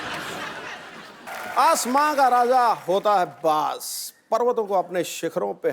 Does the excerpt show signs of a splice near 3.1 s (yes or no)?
no